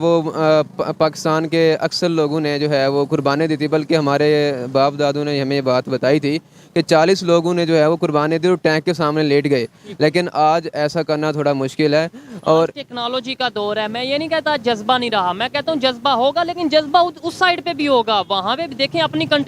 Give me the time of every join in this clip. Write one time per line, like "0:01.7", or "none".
none